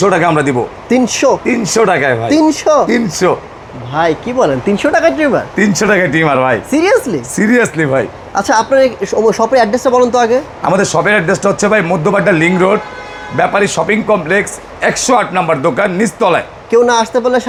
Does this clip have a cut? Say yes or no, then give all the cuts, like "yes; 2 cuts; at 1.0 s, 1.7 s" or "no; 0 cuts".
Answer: no; 0 cuts